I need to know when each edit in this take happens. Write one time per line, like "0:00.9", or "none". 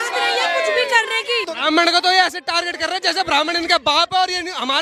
0:01.5